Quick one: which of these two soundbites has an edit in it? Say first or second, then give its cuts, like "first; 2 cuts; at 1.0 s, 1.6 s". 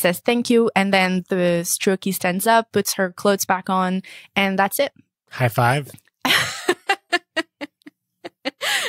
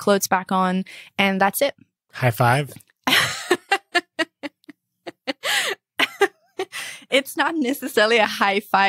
first; 1 cut; at 1.2 s